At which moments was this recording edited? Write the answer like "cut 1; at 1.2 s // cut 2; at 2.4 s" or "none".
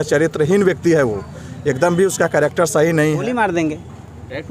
cut 1; at 3.3 s

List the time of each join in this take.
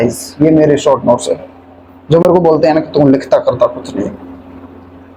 none

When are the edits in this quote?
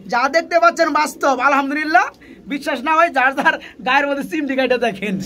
none

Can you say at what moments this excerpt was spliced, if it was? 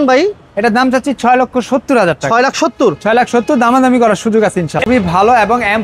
cut 1; at 4.9 s

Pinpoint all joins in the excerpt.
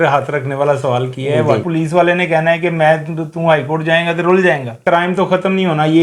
cut 1; at 1.6 s // cut 2; at 4.8 s

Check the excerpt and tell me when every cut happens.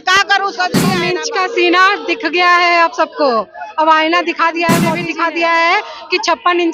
cut 1; at 1.0 s // cut 2; at 5.0 s

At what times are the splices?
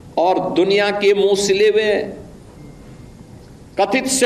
none

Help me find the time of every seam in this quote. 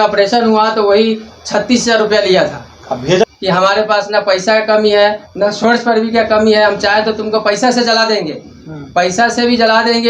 cut 1; at 3.2 s

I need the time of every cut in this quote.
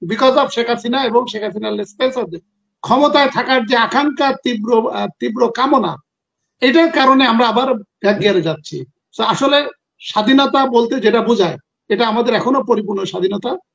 none

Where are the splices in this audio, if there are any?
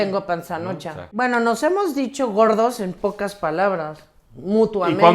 cut 1; at 1.1 s

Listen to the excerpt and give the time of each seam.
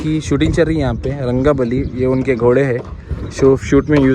none

